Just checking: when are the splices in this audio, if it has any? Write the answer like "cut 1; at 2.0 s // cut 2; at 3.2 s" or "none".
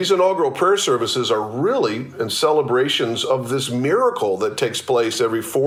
none